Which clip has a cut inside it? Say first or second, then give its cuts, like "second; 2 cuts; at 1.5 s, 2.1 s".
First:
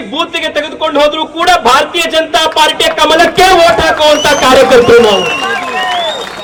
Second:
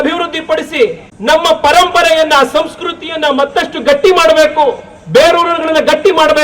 second; 1 cut; at 1.1 s